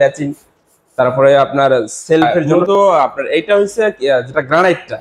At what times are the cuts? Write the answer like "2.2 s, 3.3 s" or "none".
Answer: 2.5 s